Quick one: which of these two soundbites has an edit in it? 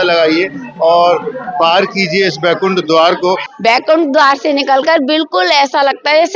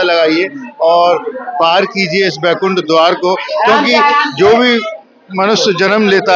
first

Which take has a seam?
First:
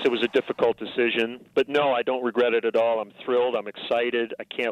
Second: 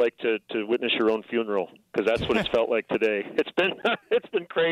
first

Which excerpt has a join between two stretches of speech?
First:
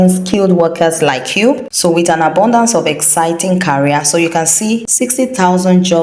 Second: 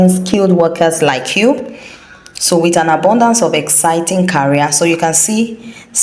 first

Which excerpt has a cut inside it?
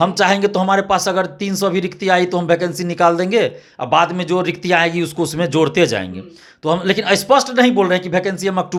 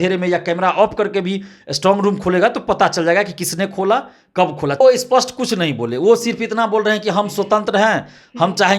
second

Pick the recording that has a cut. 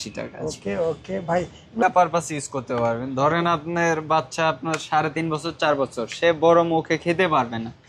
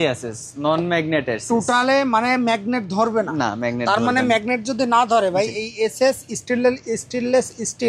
first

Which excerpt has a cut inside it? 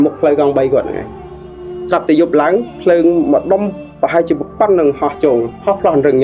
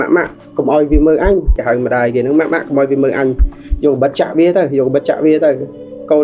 second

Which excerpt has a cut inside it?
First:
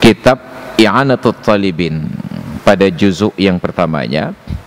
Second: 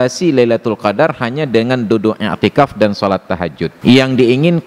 second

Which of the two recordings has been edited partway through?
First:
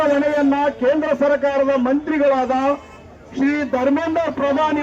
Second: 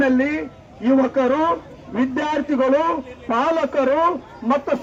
first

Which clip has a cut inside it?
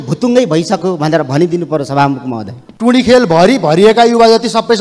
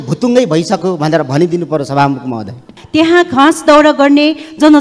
first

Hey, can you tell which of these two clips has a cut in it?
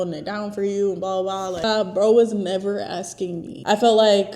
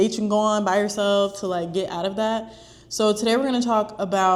first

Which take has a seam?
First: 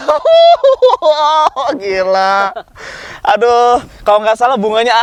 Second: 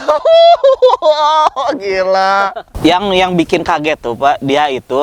second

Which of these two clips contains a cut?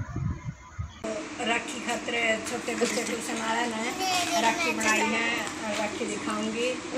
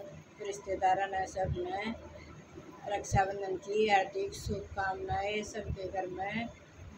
first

